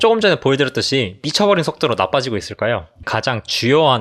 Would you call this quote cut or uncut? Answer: cut